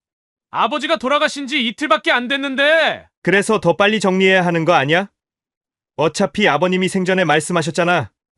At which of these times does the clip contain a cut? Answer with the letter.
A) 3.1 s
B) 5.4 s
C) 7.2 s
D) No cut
D